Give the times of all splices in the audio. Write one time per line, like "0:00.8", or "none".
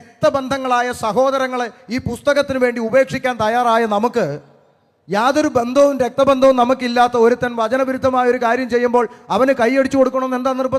none